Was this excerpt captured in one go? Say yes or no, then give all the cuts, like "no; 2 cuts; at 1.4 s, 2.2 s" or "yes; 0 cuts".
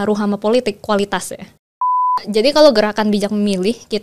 no; 1 cut; at 2.1 s